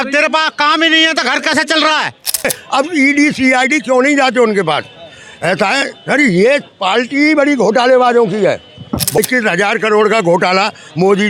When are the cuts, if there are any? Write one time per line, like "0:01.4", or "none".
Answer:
0:02.6
0:09.2